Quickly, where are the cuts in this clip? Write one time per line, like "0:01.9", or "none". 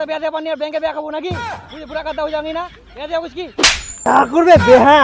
none